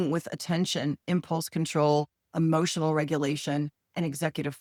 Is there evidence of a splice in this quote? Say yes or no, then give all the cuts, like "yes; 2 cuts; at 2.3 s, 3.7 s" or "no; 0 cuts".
no; 0 cuts